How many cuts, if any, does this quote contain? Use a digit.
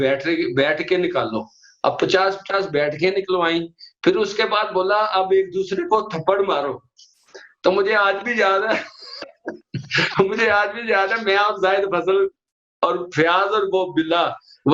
0